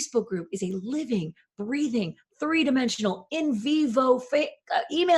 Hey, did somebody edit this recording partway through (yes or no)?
no